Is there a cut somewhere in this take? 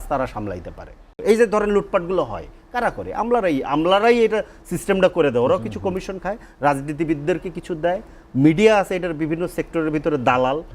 yes; 1 cut; at 1.1 s

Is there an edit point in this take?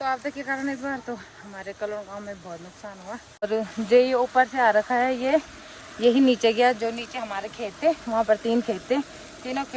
yes; 1 cut; at 3.5 s

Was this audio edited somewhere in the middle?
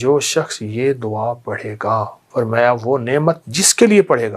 yes; 1 cut; at 2.2 s

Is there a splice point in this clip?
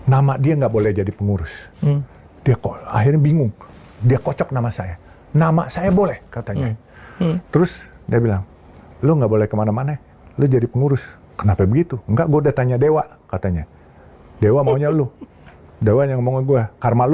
no; 0 cuts

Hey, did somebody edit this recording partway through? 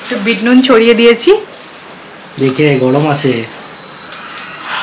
no; 0 cuts

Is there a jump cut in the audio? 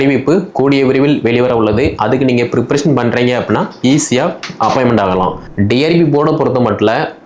yes; 1 cut; at 5.4 s

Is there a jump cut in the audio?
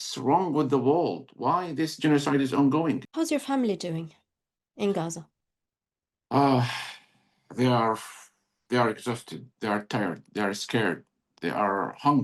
yes; 1 cut; at 3.1 s

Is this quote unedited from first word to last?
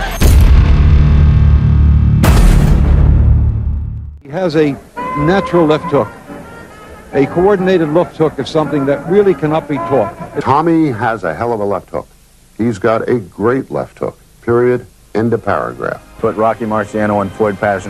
yes; 0 cuts

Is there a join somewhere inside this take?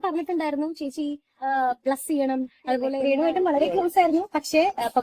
yes; 1 cut; at 3.0 s

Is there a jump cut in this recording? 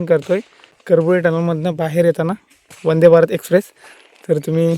yes; 1 cut; at 0.9 s

